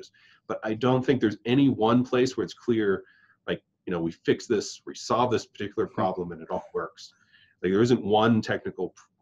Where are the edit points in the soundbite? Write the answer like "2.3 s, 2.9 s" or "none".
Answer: none